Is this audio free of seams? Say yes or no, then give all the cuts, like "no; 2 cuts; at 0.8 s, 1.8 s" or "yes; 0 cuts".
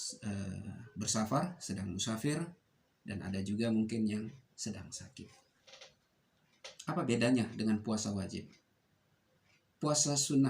no; 1 cut; at 5.7 s